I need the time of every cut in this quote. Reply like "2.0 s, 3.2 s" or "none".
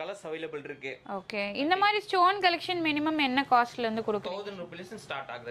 none